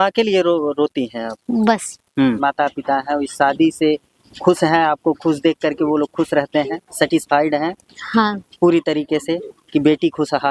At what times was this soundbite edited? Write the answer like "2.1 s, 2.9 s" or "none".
2.4 s